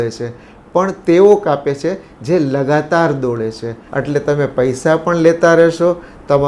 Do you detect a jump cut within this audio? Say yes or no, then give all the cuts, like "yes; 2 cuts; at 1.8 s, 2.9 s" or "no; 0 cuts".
yes; 1 cut; at 3.7 s